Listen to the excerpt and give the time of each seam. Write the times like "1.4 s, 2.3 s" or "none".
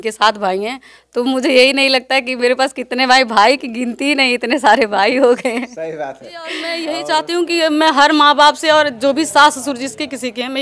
6.7 s